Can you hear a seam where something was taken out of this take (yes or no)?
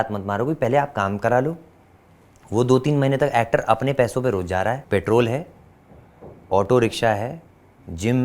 yes